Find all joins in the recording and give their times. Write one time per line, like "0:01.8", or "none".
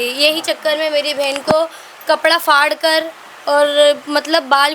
none